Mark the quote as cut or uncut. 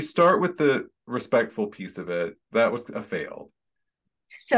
uncut